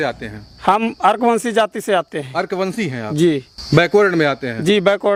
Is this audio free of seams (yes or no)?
yes